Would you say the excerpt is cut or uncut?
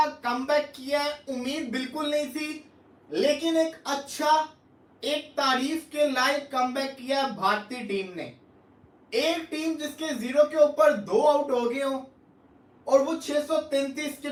uncut